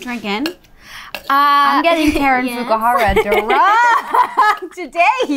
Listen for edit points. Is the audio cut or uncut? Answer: uncut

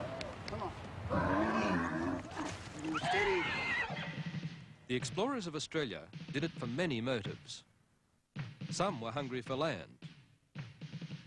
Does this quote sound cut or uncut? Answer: uncut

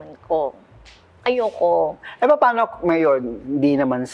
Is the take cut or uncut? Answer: uncut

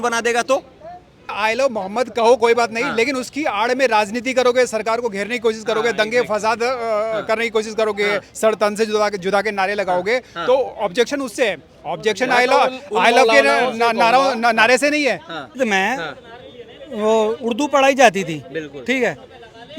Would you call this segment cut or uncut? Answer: cut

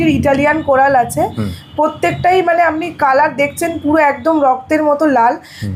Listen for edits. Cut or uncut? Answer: uncut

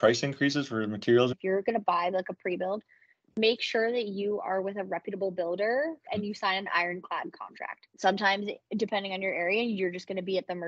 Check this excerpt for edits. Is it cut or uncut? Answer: cut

